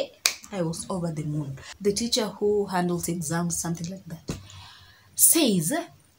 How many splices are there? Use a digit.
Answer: 1